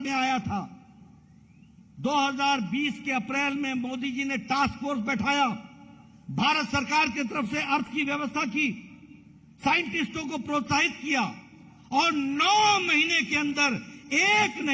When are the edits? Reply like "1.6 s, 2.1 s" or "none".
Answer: none

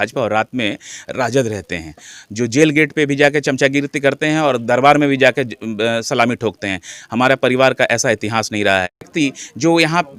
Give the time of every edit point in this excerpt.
9.1 s

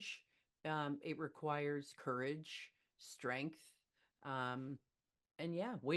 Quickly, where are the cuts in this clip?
none

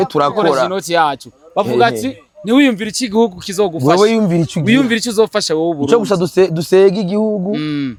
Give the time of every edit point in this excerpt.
none

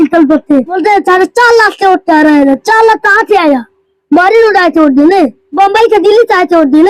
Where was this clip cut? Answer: 0.8 s, 5.6 s

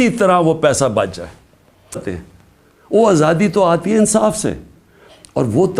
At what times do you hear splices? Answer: 2.1 s

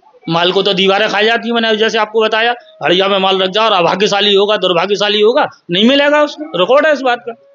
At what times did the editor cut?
none

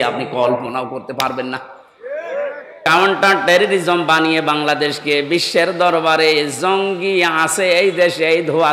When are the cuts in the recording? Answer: 2.8 s

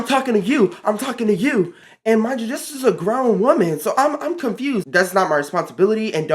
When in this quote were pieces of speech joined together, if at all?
1.9 s, 4.9 s

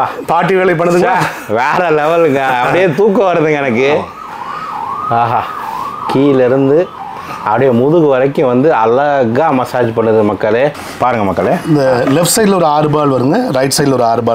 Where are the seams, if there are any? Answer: 10.8 s

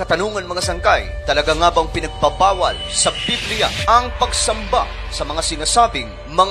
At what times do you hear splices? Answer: none

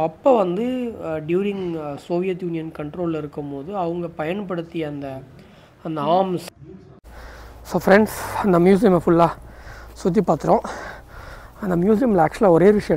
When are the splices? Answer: 6.6 s

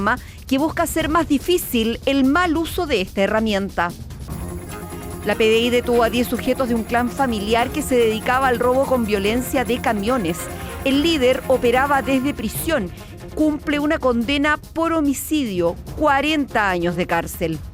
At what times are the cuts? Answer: none

